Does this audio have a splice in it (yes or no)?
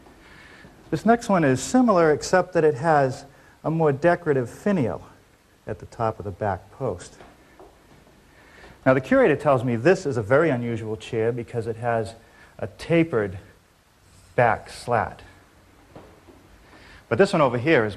yes